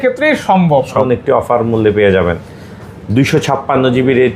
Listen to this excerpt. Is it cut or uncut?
cut